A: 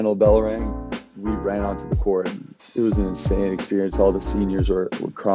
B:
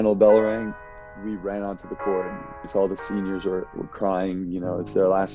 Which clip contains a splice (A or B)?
B